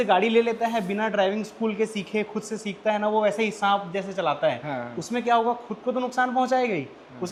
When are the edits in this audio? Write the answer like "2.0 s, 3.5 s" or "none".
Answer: none

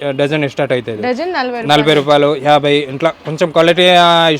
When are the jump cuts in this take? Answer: none

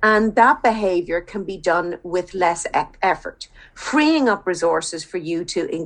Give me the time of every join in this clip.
none

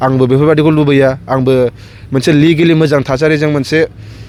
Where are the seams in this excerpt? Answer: none

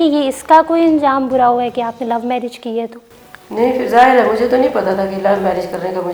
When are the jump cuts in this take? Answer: none

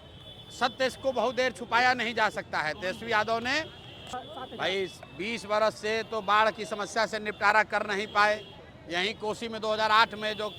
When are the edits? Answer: 4.0 s

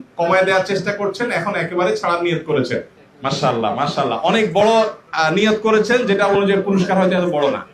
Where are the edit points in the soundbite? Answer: 3.0 s

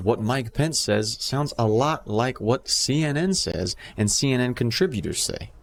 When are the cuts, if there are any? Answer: none

